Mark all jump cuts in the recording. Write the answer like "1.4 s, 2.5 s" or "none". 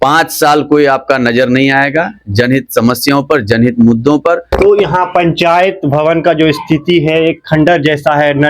4.5 s